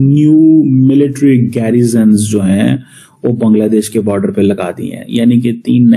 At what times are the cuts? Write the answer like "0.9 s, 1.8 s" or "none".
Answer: none